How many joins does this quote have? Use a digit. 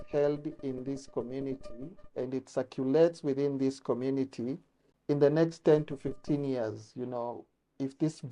1